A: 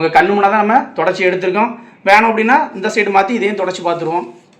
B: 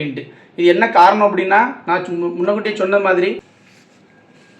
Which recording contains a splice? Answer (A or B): B